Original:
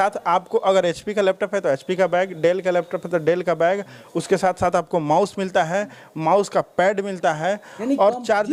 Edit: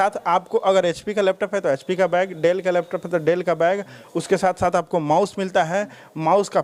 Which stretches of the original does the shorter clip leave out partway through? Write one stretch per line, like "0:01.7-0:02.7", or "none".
none